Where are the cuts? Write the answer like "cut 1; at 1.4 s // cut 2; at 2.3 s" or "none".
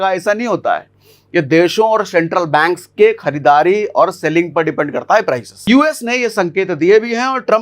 cut 1; at 5.7 s